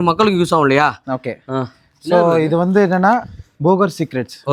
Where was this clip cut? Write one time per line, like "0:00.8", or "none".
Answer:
none